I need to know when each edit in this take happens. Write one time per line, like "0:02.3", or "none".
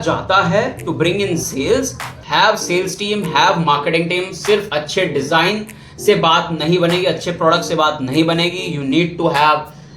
0:02.2